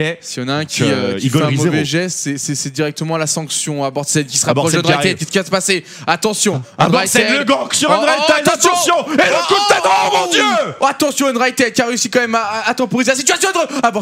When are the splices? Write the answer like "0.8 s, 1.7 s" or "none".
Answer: none